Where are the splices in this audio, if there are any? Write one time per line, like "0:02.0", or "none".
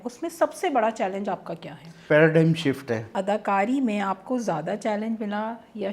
0:02.0
0:03.1